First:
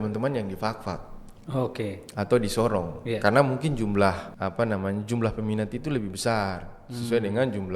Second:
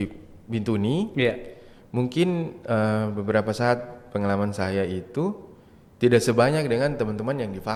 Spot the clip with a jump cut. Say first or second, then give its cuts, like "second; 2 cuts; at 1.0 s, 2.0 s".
first; 1 cut; at 4.3 s